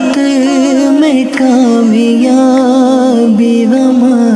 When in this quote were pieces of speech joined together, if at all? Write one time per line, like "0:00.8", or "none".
none